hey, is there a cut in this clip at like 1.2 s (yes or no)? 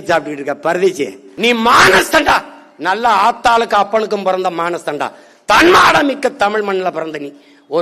yes